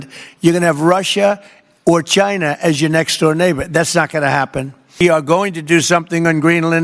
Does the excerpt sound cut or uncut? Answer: cut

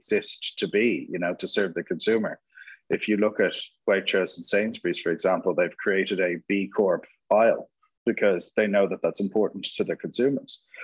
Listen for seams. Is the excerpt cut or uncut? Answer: uncut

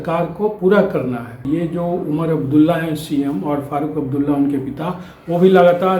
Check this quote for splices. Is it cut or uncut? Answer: cut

